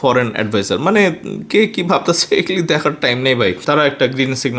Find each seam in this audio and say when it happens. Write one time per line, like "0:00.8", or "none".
0:03.6